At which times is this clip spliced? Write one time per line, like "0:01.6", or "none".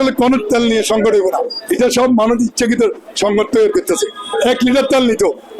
none